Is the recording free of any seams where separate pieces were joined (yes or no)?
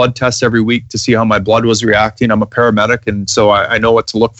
yes